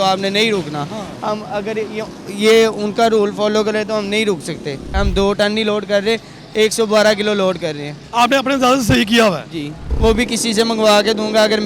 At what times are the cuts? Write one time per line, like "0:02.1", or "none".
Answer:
0:04.9
0:09.8

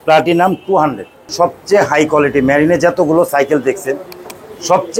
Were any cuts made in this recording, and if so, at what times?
0:01.3

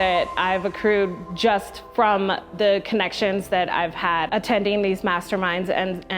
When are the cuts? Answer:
0:04.3

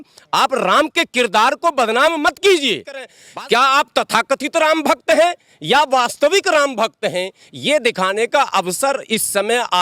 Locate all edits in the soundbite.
0:03.1

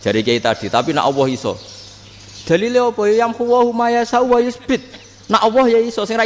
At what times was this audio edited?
none

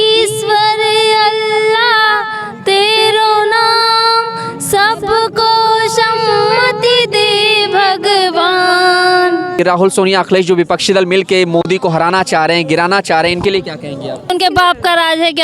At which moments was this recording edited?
0:09.6
0:14.3

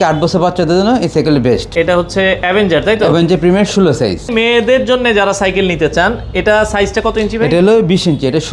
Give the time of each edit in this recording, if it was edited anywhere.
0:01.7
0:04.3

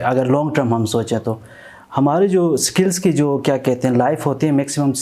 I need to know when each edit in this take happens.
none

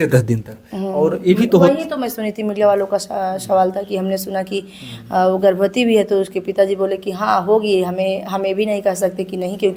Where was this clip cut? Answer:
none

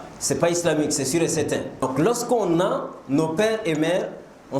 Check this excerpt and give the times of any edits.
0:01.7

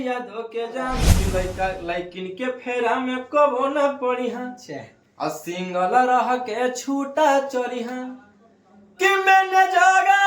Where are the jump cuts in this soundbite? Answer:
0:01.1

